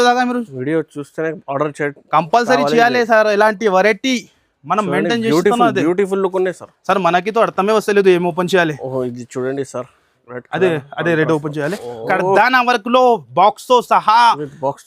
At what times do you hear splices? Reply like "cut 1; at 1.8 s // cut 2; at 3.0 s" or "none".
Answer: cut 1; at 12.0 s